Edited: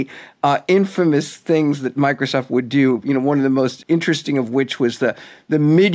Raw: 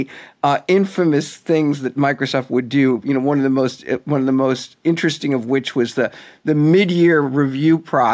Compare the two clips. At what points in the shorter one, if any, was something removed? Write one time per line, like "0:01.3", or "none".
0:03.8